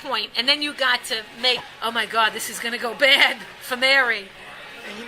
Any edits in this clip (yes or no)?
no